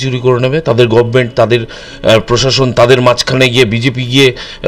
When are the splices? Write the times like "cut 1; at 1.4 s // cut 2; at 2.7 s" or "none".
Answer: none